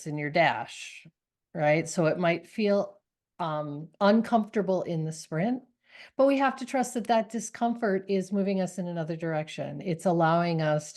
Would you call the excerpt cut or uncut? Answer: uncut